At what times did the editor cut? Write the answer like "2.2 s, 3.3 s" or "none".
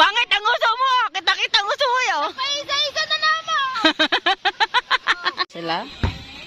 5.5 s